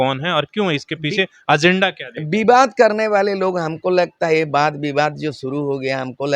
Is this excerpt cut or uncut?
uncut